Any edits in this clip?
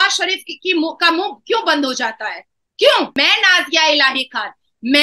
yes; 1 cut; at 3.2 s

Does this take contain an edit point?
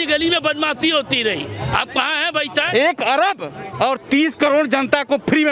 yes; 1 cut; at 2.7 s

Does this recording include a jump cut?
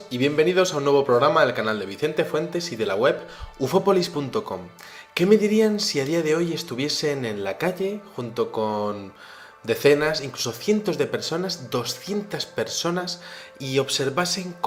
no; 0 cuts

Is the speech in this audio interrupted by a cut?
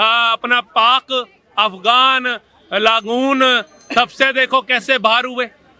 no; 0 cuts

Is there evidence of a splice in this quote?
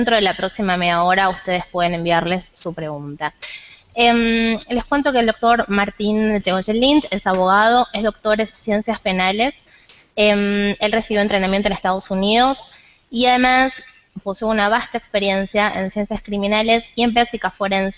no; 0 cuts

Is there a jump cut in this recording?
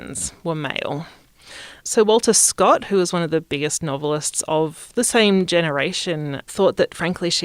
yes; 2 cuts; at 1.8 s, 6.4 s

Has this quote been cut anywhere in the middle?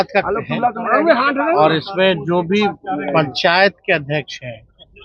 no; 0 cuts

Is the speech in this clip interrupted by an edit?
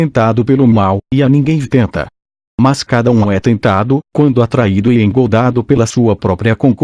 no; 0 cuts

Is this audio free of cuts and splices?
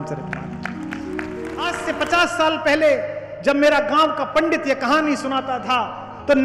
no; 1 cut; at 1.8 s

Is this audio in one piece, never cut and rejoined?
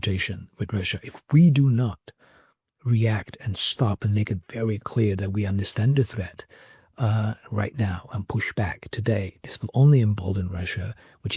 yes; 0 cuts

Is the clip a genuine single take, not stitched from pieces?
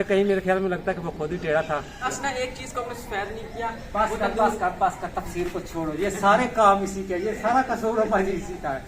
no; 1 cut; at 2.1 s

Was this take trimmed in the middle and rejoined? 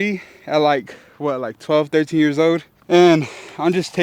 yes; 1 cut; at 2.7 s

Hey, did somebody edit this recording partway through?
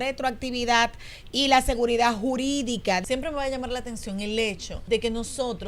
yes; 2 cuts; at 3.0 s, 4.7 s

